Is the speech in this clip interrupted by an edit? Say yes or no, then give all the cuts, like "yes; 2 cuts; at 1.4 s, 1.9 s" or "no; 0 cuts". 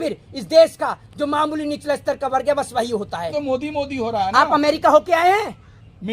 yes; 1 cut; at 3.3 s